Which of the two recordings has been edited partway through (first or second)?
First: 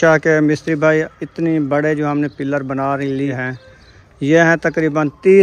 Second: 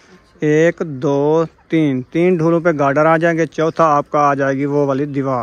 first